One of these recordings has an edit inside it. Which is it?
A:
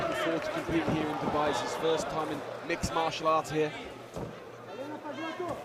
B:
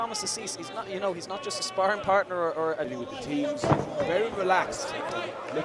B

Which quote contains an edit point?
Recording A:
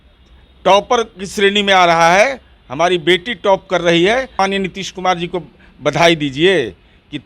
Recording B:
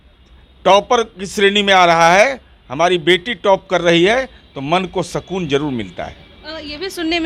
A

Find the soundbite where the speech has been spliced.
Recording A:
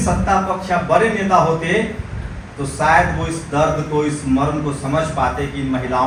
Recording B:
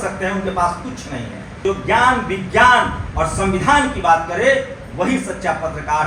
B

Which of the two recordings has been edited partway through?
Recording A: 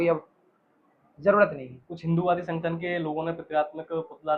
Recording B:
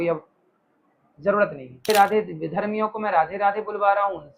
B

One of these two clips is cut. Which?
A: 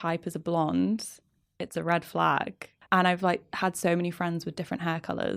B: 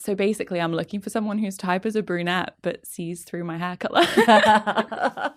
A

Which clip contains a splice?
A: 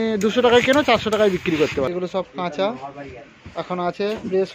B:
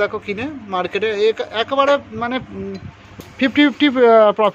A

